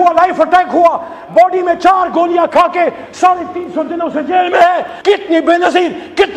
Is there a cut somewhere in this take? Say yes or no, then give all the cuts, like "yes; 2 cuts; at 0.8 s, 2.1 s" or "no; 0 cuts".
yes; 1 cut; at 4.9 s